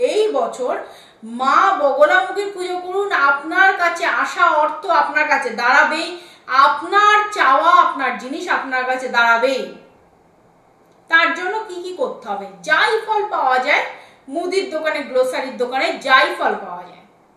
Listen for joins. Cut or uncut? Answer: uncut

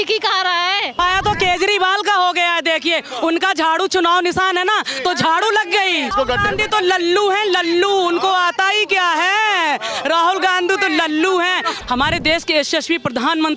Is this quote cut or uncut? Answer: cut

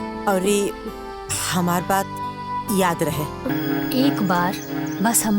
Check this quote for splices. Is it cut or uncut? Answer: cut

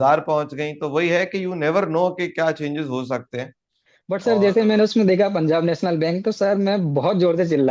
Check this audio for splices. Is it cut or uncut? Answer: cut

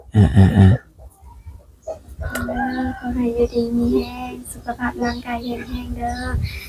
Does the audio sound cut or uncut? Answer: cut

